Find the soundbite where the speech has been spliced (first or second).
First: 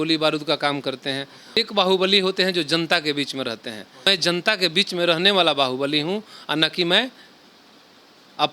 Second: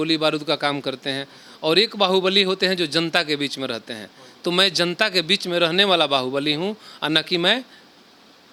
first